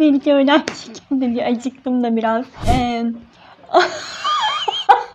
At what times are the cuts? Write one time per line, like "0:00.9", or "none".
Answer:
0:02.5